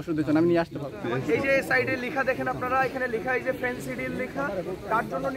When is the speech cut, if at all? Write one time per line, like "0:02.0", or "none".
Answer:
0:01.0